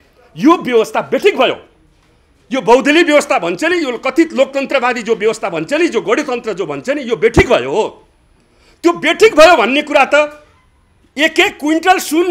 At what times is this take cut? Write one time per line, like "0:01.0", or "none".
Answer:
none